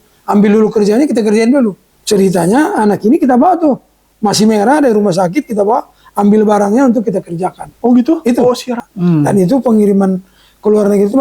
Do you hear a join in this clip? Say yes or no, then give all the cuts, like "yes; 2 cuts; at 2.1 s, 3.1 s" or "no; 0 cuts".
yes; 2 cuts; at 1.9 s, 8.7 s